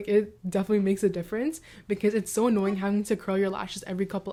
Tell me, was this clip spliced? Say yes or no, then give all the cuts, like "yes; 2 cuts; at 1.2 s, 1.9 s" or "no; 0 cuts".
no; 0 cuts